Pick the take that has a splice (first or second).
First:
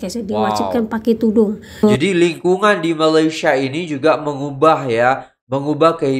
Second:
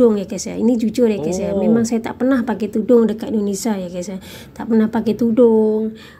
first